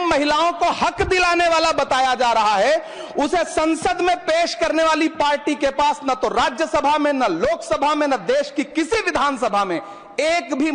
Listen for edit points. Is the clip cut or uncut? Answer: uncut